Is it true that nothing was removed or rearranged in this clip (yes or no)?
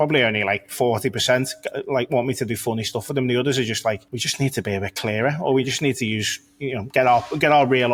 yes